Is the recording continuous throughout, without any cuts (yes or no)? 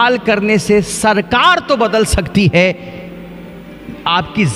yes